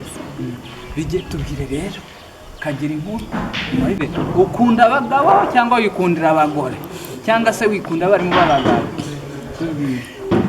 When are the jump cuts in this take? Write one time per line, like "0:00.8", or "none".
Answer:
0:04.0